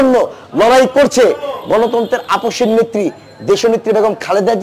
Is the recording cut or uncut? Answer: uncut